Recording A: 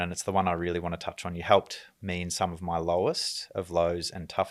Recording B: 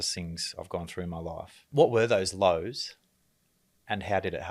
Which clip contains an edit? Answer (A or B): B